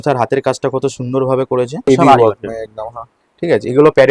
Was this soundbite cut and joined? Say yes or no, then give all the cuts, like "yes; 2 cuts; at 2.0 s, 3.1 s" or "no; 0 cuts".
yes; 1 cut; at 1.9 s